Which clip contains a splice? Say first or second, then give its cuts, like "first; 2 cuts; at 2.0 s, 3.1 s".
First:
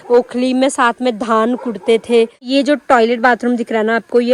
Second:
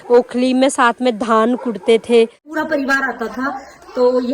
second; 1 cut; at 2.4 s